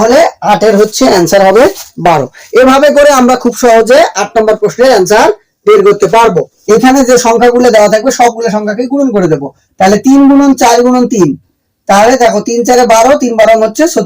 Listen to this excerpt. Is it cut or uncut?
cut